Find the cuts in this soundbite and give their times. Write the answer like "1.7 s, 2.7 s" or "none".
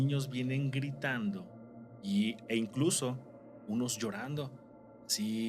none